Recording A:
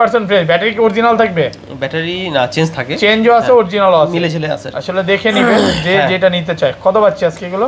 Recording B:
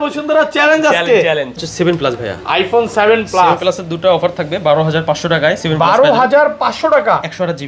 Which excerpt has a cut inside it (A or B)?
B